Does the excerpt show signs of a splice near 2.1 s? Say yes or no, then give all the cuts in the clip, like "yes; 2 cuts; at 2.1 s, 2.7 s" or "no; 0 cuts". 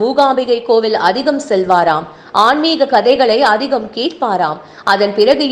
no; 0 cuts